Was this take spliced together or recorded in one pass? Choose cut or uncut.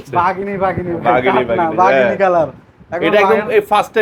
uncut